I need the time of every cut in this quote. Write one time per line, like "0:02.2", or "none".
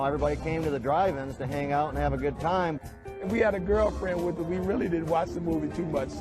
0:02.8